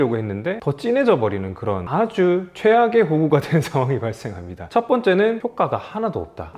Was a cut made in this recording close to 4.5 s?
yes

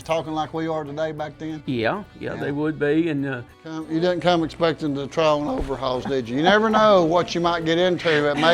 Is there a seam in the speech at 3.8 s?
yes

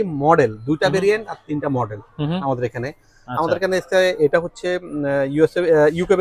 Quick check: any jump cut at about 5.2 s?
no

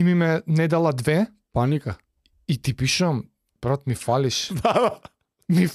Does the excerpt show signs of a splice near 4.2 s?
no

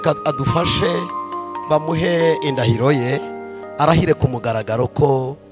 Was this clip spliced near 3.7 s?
no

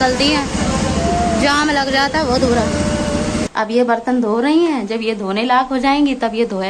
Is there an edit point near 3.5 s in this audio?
yes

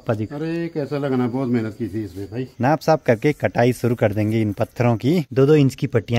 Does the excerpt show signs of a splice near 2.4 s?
yes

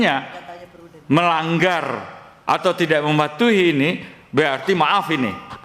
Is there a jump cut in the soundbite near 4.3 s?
no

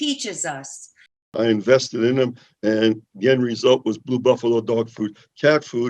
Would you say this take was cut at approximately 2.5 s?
no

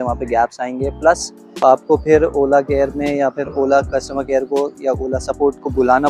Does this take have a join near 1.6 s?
yes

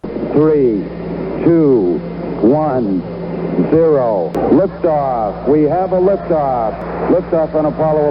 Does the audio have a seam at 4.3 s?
yes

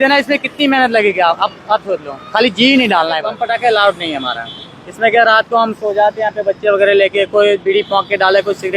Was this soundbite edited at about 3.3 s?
yes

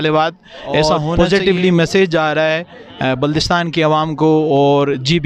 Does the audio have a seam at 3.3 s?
no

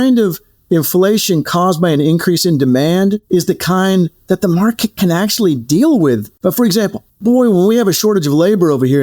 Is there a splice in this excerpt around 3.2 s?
no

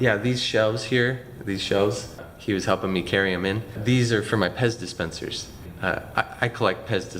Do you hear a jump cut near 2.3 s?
yes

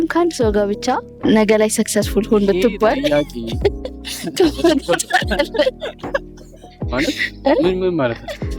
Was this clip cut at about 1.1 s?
yes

